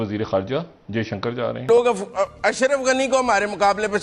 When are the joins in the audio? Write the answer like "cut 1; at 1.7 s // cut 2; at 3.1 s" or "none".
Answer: cut 1; at 1.7 s